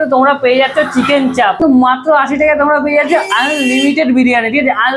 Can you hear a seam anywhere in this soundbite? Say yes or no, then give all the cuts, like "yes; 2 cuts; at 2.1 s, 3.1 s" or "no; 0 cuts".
yes; 1 cut; at 1.6 s